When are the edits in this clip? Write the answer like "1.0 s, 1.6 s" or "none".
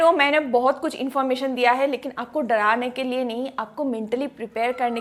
none